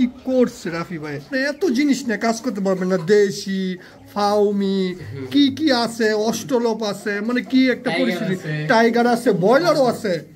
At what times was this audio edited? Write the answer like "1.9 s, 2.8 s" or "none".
1.3 s

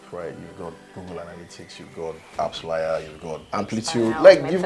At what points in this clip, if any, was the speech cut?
2.3 s, 3.4 s

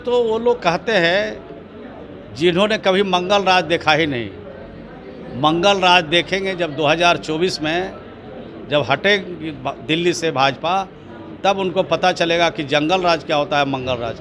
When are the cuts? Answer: none

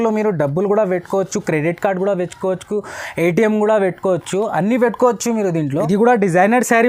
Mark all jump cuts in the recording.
5.7 s

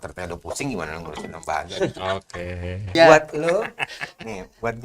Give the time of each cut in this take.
3.0 s

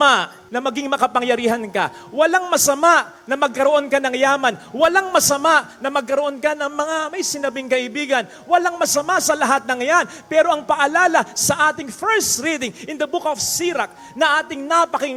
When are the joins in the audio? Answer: none

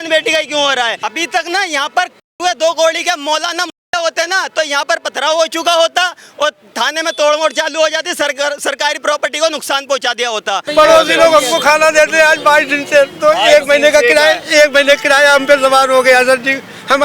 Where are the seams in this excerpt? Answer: 1.0 s, 10.7 s

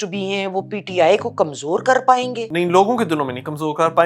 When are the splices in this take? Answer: 2.5 s

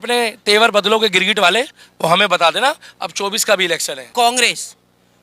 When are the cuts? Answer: 4.0 s

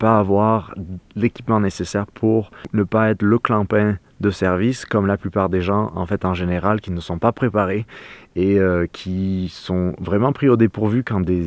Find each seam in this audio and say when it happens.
2.7 s

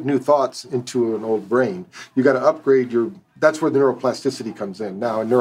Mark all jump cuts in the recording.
none

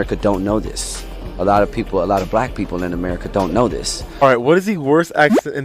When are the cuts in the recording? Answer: 4.1 s

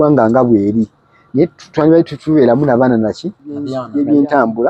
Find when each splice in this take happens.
3.8 s

